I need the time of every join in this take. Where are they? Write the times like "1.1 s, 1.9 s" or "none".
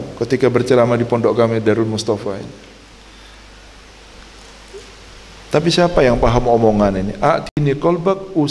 2.8 s